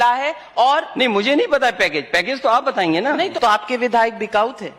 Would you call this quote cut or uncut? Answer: cut